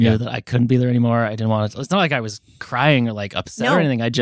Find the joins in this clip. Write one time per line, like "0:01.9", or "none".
none